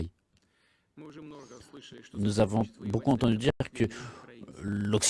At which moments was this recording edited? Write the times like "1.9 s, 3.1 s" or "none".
none